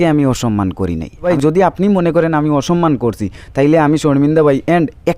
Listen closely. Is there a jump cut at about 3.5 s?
no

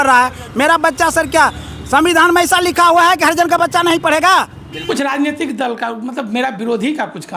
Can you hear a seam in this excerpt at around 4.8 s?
yes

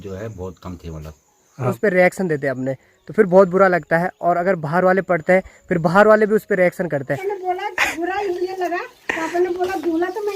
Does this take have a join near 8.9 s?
no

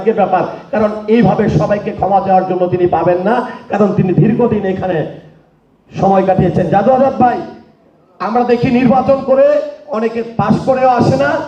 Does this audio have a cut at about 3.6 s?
no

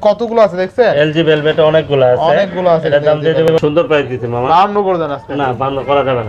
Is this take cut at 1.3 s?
no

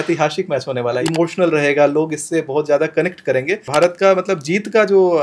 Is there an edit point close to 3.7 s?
yes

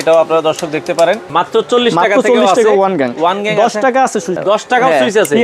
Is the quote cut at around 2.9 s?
no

